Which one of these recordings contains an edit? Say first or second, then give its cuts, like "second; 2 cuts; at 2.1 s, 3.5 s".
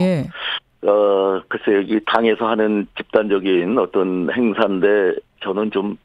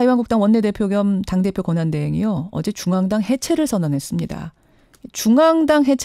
first; 1 cut; at 2.0 s